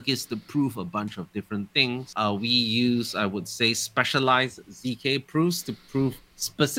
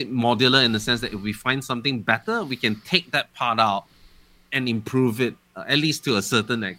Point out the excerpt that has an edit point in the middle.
first; 1 cut; at 2.1 s

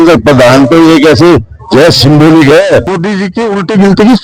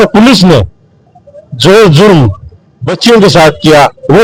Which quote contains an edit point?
first; 1 cut; at 2.9 s

